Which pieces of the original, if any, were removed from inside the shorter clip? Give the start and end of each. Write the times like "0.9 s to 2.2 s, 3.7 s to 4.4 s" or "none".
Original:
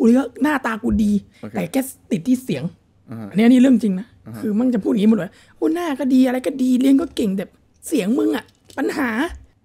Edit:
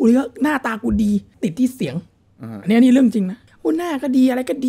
1.3 s to 2.0 s, 4.1 s to 5.4 s